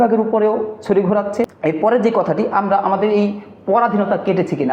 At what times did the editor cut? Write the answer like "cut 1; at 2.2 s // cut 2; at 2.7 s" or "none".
cut 1; at 1.5 s